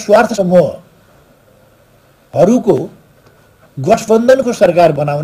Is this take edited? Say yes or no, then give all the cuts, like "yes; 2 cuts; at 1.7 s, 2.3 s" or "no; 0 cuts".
no; 0 cuts